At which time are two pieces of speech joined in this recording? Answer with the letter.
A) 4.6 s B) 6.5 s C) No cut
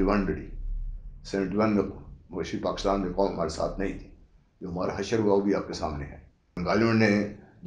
B